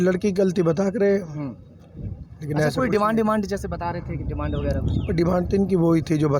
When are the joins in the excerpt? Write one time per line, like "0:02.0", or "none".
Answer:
none